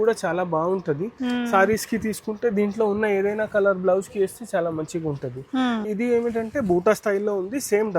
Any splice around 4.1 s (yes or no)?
no